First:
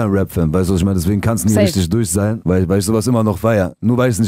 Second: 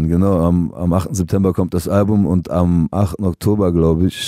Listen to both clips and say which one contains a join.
first; 1 cut; at 2.4 s

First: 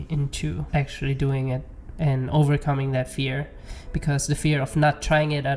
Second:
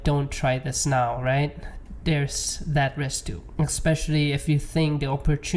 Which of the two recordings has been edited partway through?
second; 1 cut; at 3.4 s

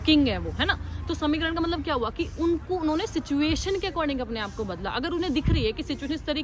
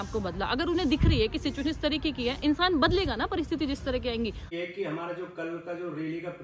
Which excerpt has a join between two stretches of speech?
second; 1 cut; at 4.5 s

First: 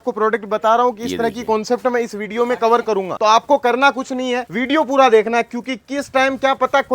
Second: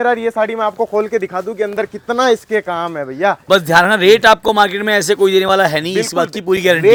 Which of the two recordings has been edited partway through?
first; 2 cuts; at 3.1 s, 4.5 s

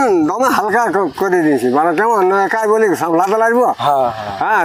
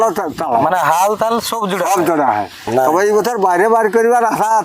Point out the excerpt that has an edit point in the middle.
second; 1 cut; at 2.6 s

